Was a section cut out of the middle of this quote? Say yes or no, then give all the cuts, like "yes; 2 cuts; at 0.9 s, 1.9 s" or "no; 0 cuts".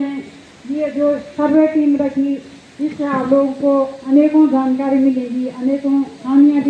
no; 0 cuts